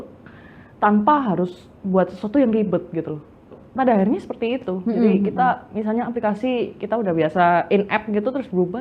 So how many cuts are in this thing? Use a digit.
1